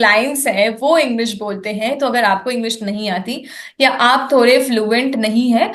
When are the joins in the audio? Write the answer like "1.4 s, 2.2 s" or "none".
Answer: none